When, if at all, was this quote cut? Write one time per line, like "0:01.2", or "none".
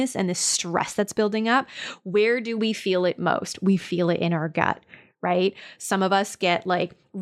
none